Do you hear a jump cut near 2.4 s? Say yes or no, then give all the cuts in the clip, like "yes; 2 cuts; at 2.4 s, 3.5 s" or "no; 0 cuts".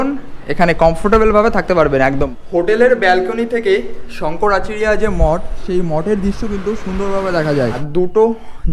yes; 2 cuts; at 2.4 s, 7.8 s